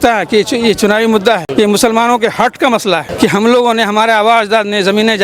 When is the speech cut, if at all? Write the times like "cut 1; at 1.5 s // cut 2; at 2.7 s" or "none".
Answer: cut 1; at 1.5 s // cut 2; at 3.1 s